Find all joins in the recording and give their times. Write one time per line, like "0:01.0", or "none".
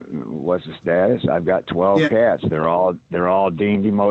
none

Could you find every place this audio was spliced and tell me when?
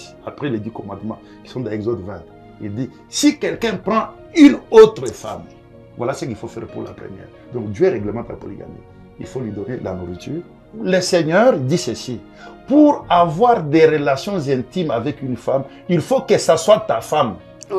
0:10.7

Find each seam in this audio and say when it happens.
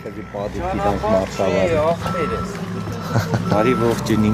none

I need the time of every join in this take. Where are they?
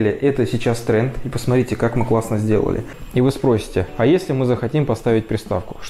0:02.9

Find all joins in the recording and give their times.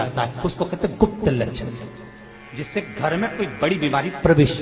none

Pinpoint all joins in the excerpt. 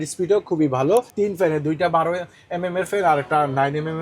0:01.1

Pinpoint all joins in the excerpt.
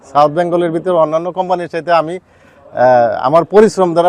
none

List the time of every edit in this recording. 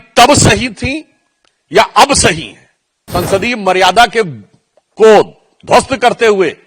0:03.0

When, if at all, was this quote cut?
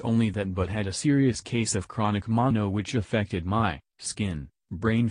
none

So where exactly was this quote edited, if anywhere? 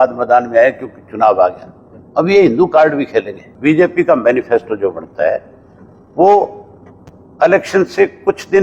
0:03.4

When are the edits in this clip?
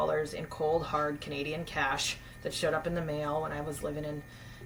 none

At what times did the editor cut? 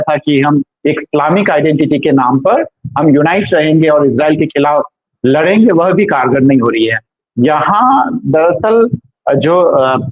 none

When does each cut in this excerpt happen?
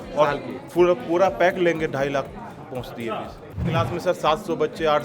0:03.6

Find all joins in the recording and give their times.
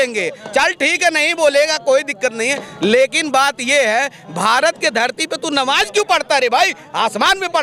none

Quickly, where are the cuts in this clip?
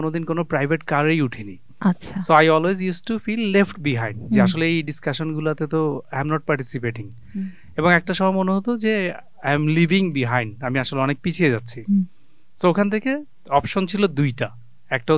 none

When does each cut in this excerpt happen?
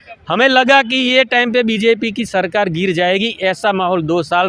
none

